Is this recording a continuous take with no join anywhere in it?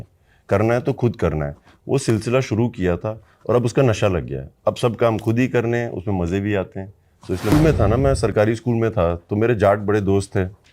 no; 1 cut; at 7.5 s

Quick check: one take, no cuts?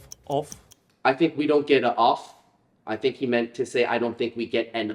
no; 1 cut; at 1.0 s

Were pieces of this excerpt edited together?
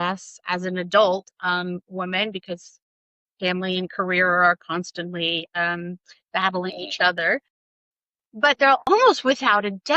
yes; 1 cut; at 8.8 s

